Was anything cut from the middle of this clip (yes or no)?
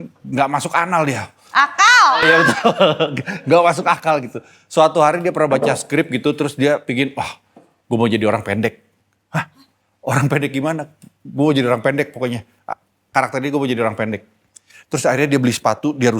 yes